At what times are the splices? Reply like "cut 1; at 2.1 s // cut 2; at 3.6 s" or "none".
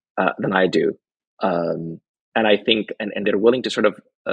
none